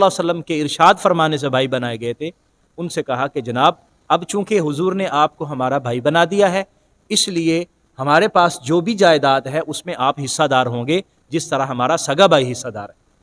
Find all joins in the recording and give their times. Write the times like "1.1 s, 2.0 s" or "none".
none